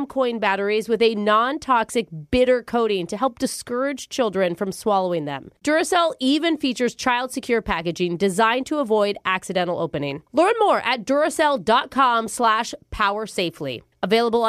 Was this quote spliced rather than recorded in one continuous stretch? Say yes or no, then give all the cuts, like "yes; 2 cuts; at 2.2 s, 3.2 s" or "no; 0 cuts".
no; 0 cuts